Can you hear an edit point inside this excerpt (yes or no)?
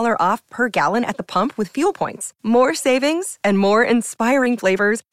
no